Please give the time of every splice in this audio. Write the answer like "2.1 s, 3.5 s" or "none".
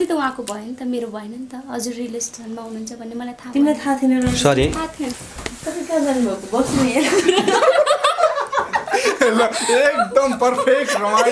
none